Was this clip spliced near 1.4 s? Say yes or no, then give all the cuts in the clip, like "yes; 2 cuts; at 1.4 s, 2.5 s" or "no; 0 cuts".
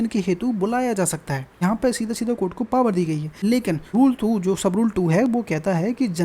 yes; 2 cuts; at 1.4 s, 3.6 s